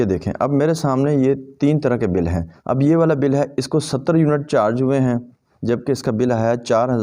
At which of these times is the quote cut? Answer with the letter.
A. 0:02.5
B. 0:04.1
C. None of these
A